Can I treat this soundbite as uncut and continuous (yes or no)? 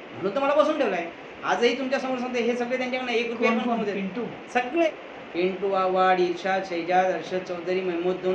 no